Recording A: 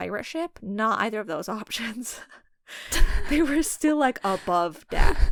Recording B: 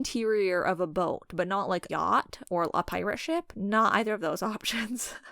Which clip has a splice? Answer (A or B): B